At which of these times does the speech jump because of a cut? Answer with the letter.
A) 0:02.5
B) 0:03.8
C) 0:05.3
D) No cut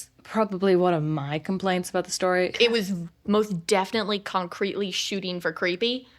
A